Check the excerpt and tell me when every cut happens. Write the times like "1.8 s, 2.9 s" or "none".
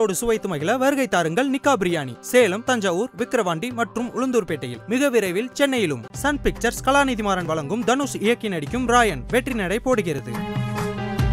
none